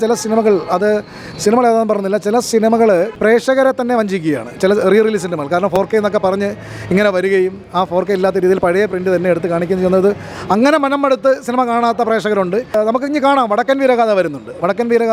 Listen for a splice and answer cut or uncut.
uncut